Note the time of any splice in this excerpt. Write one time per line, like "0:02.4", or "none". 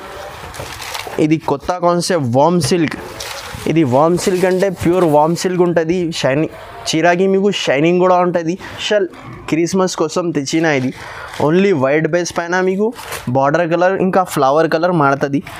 0:08.7